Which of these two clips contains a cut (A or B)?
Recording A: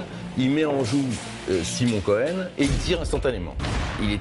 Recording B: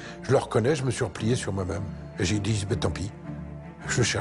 B